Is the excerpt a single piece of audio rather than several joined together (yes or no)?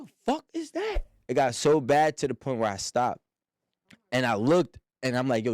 no